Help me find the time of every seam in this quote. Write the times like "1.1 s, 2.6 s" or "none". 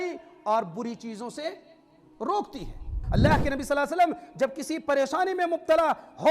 3.0 s